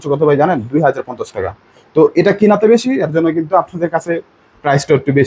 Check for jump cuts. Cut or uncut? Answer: uncut